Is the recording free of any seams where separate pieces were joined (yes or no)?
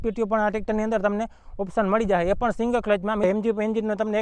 no